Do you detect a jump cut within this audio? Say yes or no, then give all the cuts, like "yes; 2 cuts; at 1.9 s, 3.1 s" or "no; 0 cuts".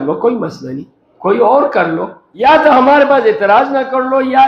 yes; 1 cut; at 2.2 s